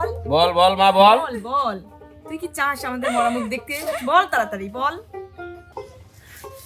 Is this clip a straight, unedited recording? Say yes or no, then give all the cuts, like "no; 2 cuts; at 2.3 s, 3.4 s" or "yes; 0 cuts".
no; 1 cut; at 5.6 s